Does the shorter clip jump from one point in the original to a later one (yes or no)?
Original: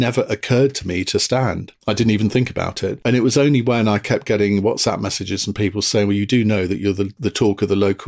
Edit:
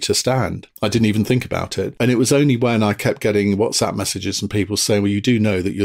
no